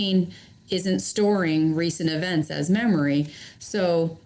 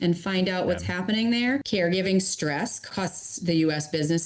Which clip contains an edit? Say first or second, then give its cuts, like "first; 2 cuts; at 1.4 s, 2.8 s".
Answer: second; 2 cuts; at 1.6 s, 2.8 s